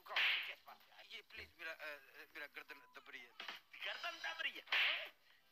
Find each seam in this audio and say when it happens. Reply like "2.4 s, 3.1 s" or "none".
0.9 s